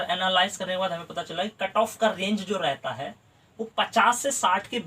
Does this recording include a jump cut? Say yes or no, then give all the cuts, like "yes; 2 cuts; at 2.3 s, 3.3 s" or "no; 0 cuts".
no; 0 cuts